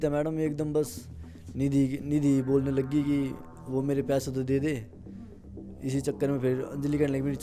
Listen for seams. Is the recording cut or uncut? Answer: uncut